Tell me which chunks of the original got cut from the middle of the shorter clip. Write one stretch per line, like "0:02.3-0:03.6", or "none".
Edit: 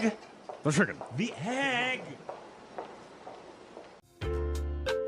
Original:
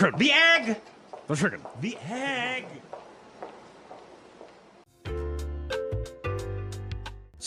0:04.7-0:04.9